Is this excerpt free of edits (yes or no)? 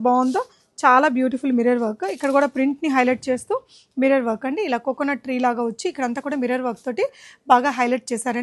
yes